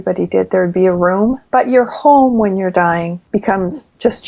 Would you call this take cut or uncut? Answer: cut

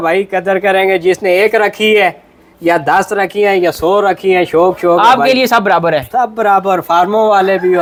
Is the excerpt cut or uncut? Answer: uncut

